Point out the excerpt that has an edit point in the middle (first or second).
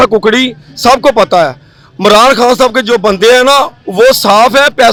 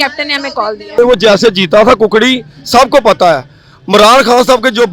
second